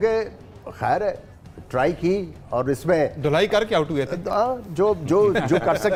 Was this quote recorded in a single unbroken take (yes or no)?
yes